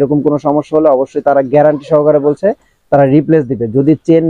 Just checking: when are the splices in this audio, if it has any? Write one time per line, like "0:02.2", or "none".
none